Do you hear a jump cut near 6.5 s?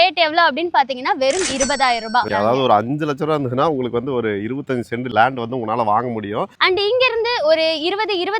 yes; 3 cuts; at 2.3 s, 5.1 s, 6.5 s

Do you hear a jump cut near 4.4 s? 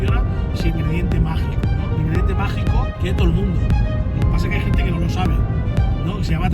no; 2 cuts; at 0.7 s, 2.9 s

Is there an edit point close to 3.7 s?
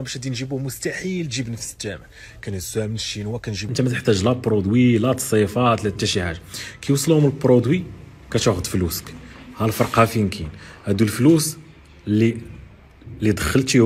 yes; 1 cut; at 3.7 s

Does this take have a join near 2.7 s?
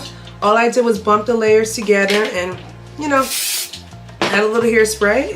no; 0 cuts

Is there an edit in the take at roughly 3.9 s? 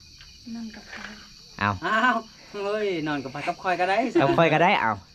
no; 0 cuts

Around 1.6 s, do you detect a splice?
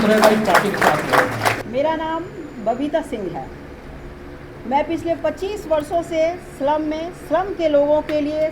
yes; 1 cut; at 1.6 s

